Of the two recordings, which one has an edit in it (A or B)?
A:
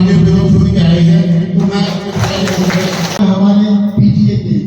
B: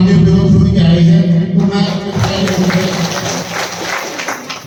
A